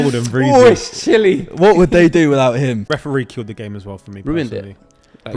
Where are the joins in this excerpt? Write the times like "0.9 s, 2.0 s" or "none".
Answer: 2.8 s